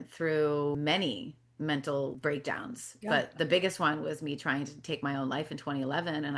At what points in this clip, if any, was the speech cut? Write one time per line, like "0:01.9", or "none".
0:00.8
0:02.2